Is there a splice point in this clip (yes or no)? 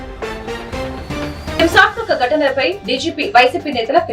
yes